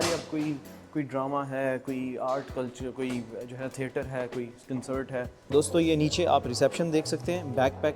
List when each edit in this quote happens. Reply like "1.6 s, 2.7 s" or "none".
5.4 s